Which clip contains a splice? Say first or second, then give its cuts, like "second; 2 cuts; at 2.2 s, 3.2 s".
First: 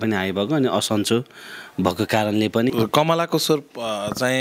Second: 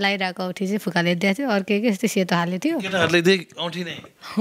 first; 1 cut; at 2.7 s